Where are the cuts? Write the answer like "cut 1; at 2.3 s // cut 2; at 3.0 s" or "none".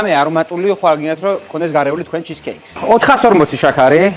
cut 1; at 2.7 s